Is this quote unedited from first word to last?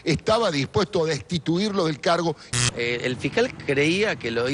yes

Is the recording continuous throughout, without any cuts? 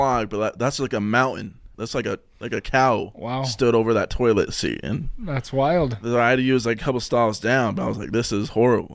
yes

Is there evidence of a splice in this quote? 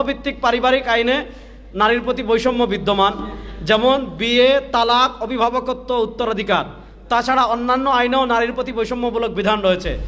no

